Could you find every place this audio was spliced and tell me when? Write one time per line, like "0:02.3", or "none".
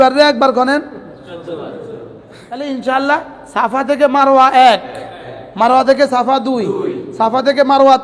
0:02.7